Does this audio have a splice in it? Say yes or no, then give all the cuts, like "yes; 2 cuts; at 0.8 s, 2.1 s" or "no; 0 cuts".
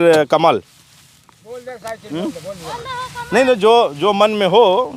no; 0 cuts